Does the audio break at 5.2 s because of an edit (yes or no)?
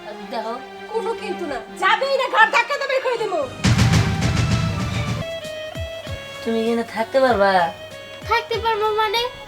yes